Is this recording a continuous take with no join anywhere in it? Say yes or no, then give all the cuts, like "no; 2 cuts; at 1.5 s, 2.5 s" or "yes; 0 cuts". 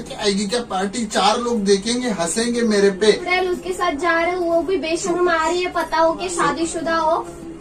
no; 1 cut; at 3.3 s